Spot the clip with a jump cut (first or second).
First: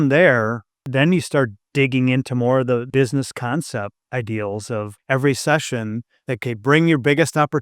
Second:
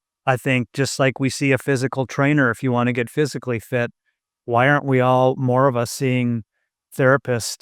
first